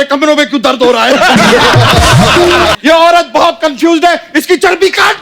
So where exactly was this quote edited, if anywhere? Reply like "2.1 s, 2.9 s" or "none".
2.8 s